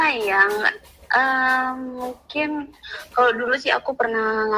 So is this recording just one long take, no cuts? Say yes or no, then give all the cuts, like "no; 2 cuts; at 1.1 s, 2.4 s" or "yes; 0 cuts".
yes; 0 cuts